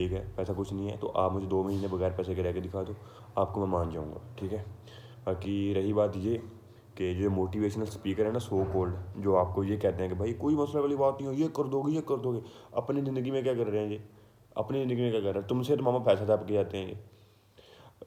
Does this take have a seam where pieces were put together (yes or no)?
no